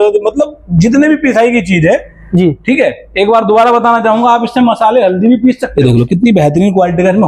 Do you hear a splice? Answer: yes; 1 cut; at 5.6 s

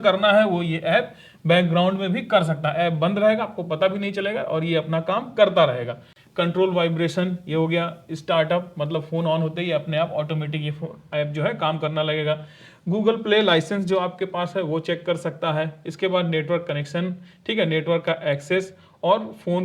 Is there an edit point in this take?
no; 0 cuts

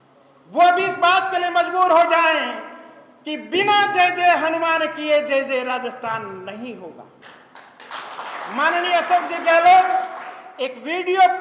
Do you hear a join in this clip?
no; 0 cuts

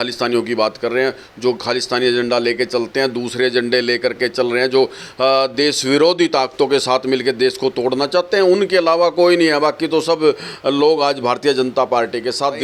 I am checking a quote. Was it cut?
no; 0 cuts

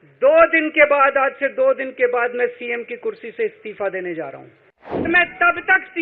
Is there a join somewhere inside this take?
yes; 1 cut; at 5.1 s

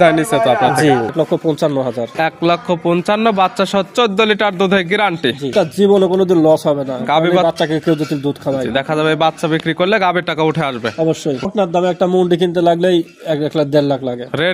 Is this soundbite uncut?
no; 3 cuts; at 1.1 s, 5.5 s, 11.5 s

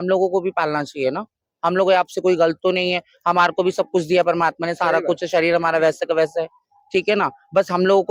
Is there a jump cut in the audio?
no; 0 cuts

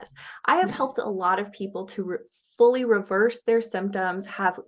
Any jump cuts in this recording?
no; 0 cuts

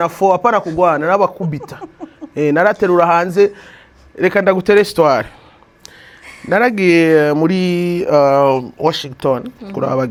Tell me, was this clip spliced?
no; 0 cuts

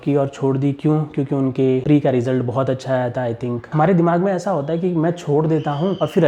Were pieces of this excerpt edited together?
yes; 1 cut; at 3.7 s

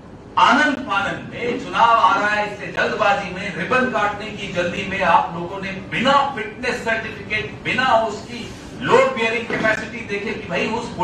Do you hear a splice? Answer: no; 0 cuts

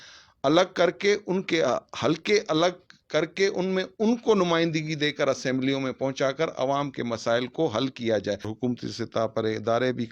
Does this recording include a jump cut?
yes; 1 cut; at 8.5 s

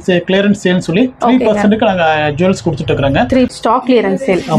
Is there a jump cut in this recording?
yes; 1 cut; at 3.5 s

